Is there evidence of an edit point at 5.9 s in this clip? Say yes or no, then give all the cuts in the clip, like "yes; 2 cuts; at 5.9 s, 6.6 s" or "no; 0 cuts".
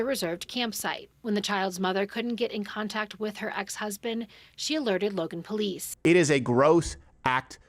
yes; 2 cuts; at 1.1 s, 5.9 s